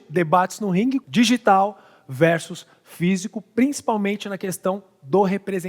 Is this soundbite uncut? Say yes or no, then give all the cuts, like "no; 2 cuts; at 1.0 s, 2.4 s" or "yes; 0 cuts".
no; 1 cut; at 1.0 s